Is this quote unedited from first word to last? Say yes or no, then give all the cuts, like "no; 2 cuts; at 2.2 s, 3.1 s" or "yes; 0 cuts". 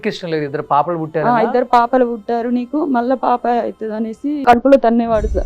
no; 1 cut; at 4.4 s